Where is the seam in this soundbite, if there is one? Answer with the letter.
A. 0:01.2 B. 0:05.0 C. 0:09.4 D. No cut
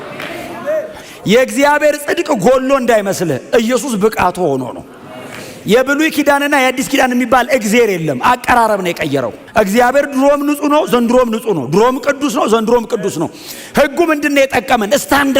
C